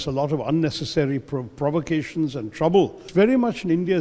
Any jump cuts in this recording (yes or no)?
yes